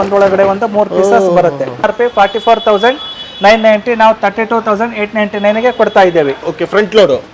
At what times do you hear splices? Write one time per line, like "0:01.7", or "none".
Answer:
0:01.8